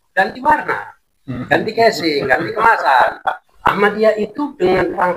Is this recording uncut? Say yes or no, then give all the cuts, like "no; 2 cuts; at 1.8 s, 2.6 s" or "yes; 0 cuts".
no; 1 cut; at 3.5 s